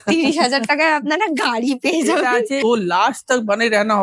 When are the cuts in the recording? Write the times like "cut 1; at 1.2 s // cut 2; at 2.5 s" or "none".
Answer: cut 1; at 2.6 s

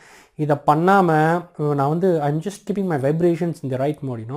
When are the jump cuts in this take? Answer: cut 1; at 1.5 s

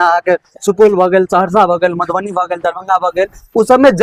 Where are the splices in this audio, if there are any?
none

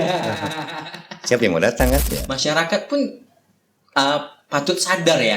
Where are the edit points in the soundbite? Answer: cut 1; at 2.0 s

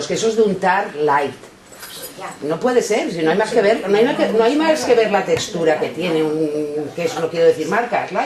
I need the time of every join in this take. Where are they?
none

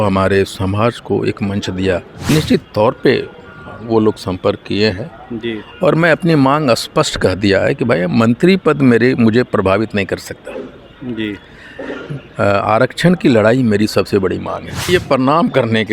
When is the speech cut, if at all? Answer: cut 1; at 2.2 s // cut 2; at 14.9 s

